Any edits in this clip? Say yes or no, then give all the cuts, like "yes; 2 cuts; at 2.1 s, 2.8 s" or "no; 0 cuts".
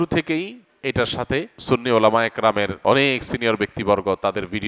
yes; 2 cuts; at 1.5 s, 2.8 s